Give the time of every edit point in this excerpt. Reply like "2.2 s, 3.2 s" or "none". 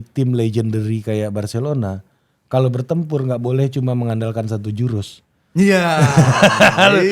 none